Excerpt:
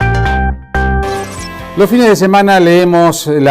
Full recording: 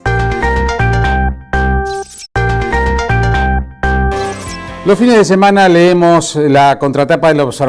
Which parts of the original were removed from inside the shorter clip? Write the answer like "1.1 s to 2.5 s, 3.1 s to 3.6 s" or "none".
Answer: 1.9 s to 4.2 s